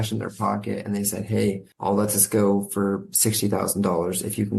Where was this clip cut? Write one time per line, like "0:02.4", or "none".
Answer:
0:01.7